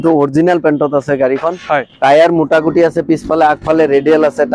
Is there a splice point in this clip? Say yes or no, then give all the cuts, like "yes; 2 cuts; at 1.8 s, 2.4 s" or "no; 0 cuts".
no; 0 cuts